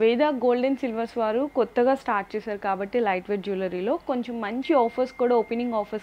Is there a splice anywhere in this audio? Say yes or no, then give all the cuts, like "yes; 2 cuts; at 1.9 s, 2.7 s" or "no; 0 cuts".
no; 0 cuts